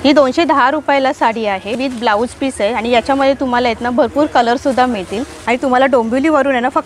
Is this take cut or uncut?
cut